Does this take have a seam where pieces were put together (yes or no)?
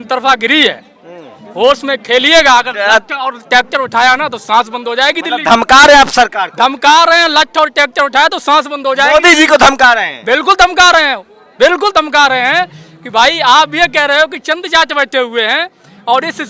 no